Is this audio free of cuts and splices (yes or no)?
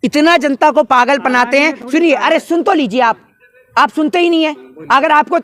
yes